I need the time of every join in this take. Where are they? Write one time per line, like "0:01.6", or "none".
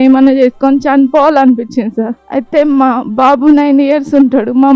0:02.2